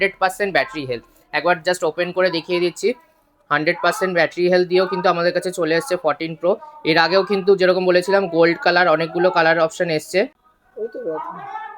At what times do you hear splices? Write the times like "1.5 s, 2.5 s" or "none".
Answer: none